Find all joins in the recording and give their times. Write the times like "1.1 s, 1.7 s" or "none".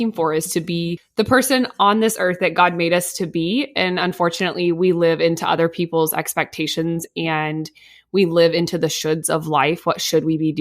1.0 s